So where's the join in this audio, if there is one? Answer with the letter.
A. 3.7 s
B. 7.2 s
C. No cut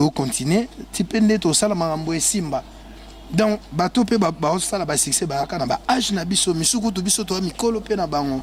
C